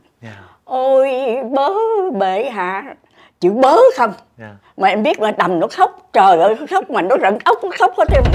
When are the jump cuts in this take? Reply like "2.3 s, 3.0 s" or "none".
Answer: none

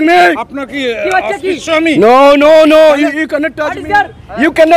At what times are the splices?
none

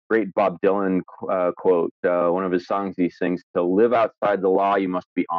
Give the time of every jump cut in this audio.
none

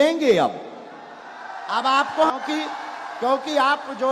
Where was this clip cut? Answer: 2.3 s

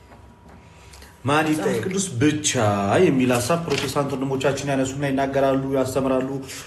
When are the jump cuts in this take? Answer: 1.9 s

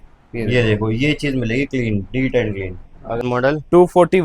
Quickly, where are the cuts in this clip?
3.2 s

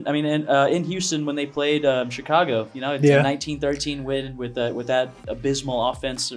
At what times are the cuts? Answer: none

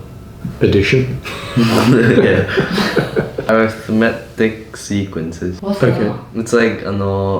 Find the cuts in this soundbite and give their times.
3.5 s, 5.6 s

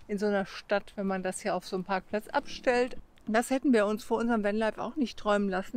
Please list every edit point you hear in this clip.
3.0 s

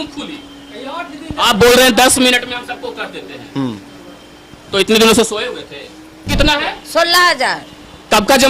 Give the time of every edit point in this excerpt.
6.3 s

